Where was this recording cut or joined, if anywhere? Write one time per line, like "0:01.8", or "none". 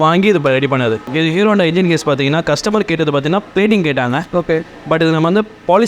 0:01.1